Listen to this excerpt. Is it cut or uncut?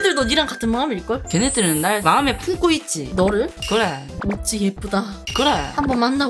uncut